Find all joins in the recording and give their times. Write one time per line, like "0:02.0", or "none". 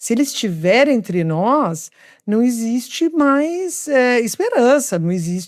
none